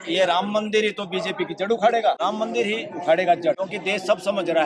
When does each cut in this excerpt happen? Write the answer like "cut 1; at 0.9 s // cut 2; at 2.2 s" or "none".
cut 1; at 2.2 s // cut 2; at 3.6 s

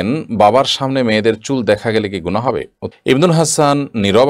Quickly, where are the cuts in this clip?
cut 1; at 2.8 s

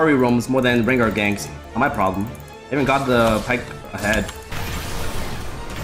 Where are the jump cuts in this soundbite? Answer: cut 1; at 1.6 s // cut 2; at 4.4 s

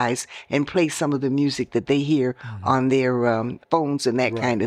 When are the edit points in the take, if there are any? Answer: cut 1; at 3.5 s

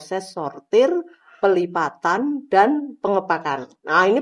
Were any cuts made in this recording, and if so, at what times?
none

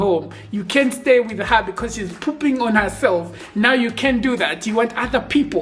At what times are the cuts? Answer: none

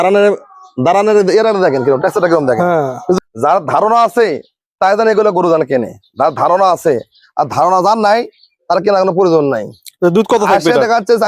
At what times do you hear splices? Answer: cut 1; at 3.2 s

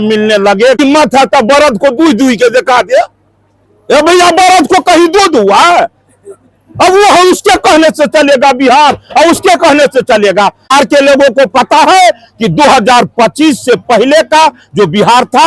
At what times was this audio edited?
cut 1; at 0.8 s // cut 2; at 10.7 s

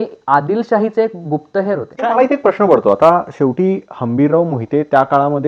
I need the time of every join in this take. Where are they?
cut 1; at 1.9 s

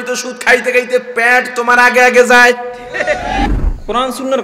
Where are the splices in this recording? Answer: cut 1; at 3.5 s

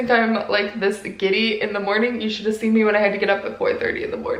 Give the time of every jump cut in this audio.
none

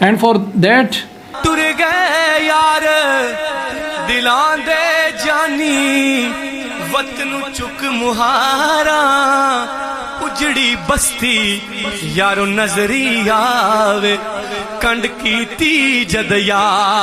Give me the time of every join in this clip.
none

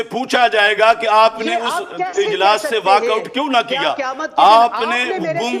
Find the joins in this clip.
none

